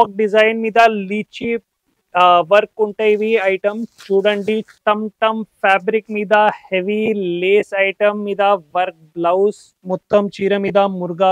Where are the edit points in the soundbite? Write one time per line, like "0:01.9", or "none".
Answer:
0:04.7
0:09.7